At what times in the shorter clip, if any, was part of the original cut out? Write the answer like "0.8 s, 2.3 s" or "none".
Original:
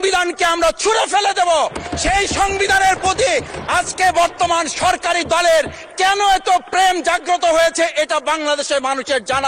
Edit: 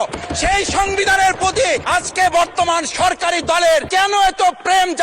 1.8 s, 3.9 s